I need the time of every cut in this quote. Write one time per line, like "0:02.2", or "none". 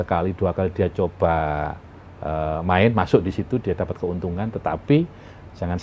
none